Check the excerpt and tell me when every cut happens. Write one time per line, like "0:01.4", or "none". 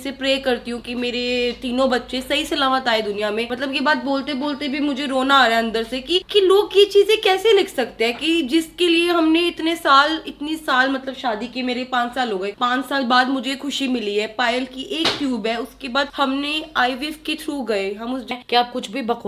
0:18.3